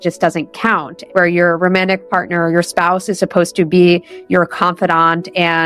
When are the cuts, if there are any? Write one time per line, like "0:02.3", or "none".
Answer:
0:00.9